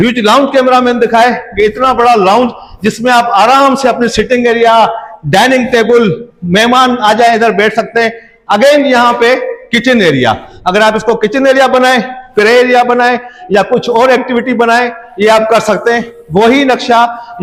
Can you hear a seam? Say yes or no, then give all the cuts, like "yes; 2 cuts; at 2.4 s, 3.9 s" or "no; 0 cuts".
no; 0 cuts